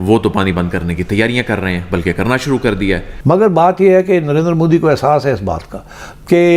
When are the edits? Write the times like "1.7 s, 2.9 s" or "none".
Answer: 3.1 s